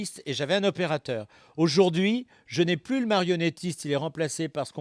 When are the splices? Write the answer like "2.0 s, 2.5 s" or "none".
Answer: none